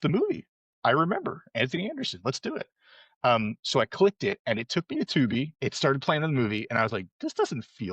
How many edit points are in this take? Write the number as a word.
one